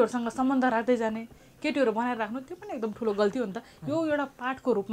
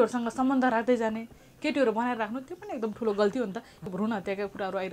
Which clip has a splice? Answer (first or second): second